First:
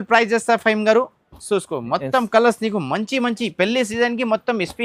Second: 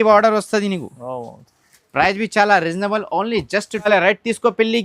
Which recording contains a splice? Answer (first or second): second